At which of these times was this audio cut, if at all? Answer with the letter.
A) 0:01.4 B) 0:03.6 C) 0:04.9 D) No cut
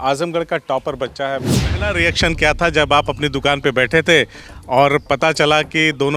A